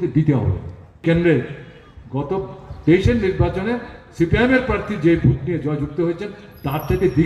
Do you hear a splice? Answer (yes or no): yes